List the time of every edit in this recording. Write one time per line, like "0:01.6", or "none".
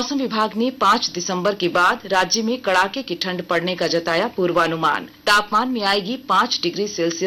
0:05.1